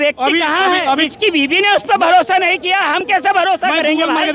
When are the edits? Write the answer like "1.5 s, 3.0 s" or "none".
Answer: 1.1 s

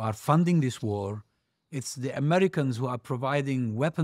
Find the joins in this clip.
none

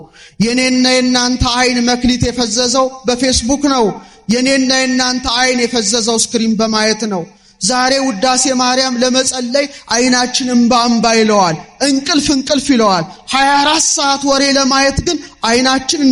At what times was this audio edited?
none

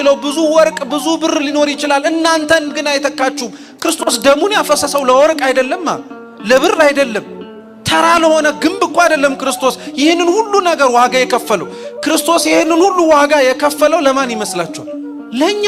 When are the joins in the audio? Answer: none

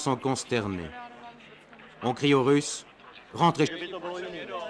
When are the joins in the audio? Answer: none

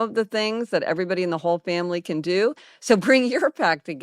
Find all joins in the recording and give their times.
2.7 s

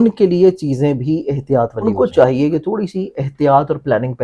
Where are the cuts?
1.9 s

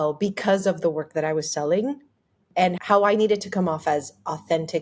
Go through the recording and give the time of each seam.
2.8 s

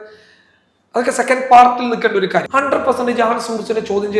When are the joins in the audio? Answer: 2.5 s

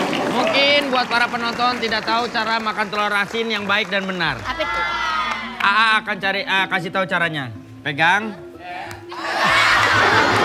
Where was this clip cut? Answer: none

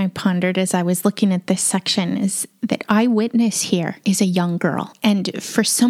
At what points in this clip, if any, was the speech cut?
3.9 s

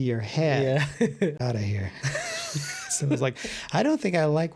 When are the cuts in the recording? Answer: 1.4 s

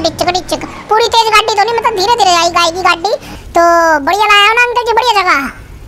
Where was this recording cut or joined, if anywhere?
3.4 s

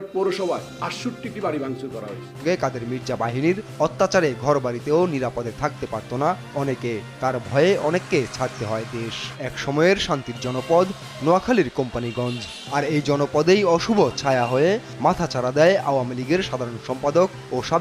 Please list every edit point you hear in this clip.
2.3 s, 9.2 s

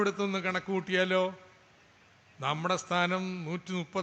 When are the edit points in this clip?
none

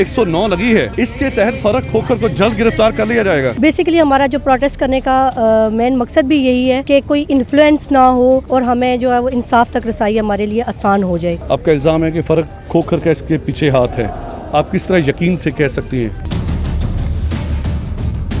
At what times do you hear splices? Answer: 0.9 s, 3.5 s, 6.8 s, 8.4 s, 11.4 s, 16.2 s

